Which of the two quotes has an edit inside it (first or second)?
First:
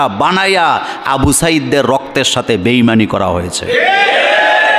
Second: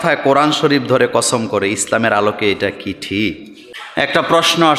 second